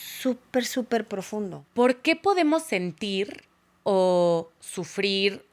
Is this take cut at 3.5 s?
no; 1 cut; at 1.6 s

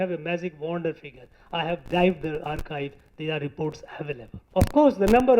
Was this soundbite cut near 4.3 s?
yes; 1 cut; at 4.3 s

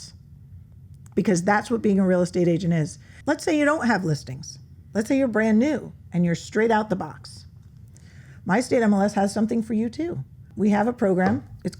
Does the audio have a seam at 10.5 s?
yes; 2 cuts; at 3.1 s, 10.5 s

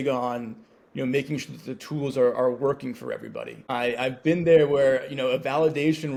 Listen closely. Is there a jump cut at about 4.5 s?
no; 0 cuts

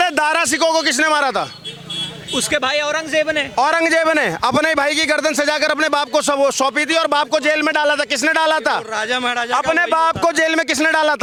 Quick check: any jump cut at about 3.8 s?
no; 0 cuts

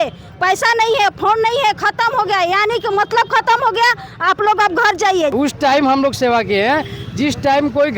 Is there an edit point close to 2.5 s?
no; 1 cut; at 5.3 s

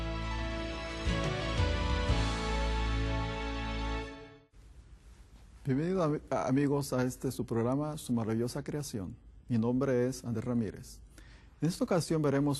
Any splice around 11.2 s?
yes; 1 cut; at 11.2 s

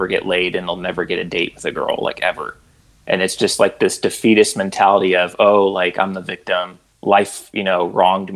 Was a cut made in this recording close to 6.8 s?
yes; 1 cut; at 6.8 s

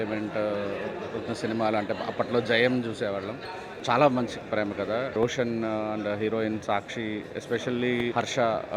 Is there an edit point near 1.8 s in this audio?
no; 0 cuts

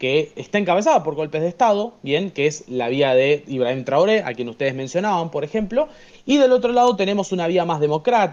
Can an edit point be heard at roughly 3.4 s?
no; 0 cuts

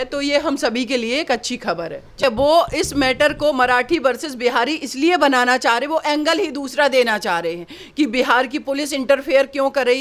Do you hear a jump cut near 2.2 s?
yes; 1 cut; at 2.2 s

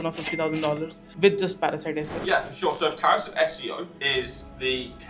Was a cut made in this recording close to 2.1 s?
yes; 2 cuts; at 2.1 s, 4.2 s

